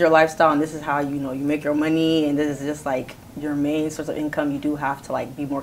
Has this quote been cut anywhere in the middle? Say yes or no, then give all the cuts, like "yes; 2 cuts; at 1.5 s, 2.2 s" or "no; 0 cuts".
no; 0 cuts